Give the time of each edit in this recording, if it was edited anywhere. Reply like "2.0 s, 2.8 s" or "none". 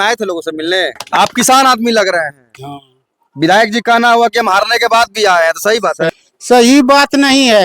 1.0 s, 6.1 s